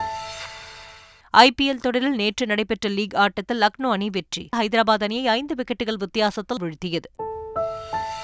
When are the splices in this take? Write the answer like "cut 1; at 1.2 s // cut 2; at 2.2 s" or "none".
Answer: cut 1; at 7.1 s